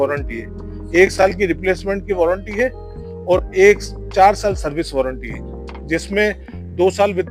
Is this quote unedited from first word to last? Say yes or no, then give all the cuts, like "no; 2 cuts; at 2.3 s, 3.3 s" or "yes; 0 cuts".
yes; 0 cuts